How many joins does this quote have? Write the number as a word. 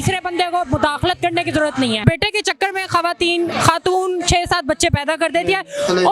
one